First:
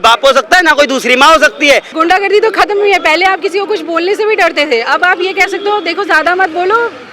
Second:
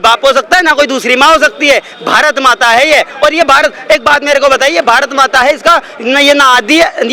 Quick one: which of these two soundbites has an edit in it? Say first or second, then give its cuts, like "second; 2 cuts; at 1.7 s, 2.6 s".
first; 1 cut; at 1.9 s